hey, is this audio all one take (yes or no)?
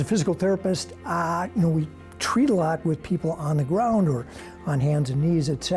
yes